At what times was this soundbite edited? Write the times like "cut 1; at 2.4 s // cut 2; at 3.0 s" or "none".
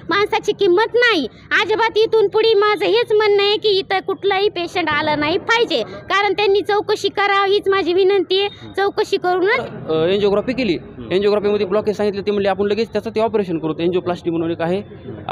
cut 1; at 9.6 s